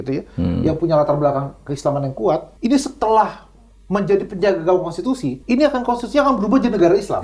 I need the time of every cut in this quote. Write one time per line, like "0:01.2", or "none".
0:02.5
0:05.3